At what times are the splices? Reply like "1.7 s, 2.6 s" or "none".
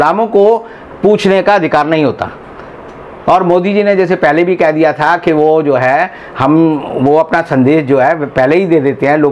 none